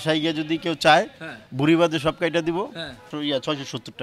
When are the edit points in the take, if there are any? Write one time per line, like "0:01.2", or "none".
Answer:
0:03.1